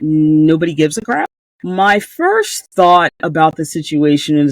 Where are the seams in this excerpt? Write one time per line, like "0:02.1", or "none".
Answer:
0:01.3